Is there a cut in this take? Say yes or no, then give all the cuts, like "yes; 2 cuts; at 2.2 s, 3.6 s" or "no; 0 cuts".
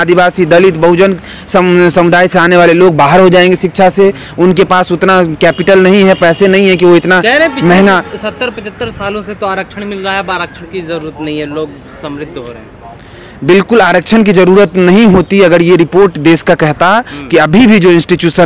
no; 0 cuts